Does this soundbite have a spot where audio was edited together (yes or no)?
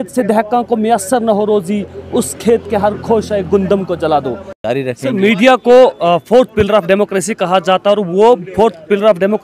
yes